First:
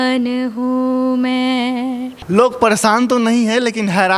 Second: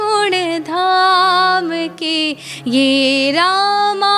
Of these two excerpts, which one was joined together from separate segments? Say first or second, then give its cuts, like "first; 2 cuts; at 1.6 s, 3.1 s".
first; 1 cut; at 2.1 s